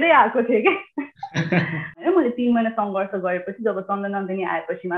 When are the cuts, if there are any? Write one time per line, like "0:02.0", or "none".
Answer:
0:02.0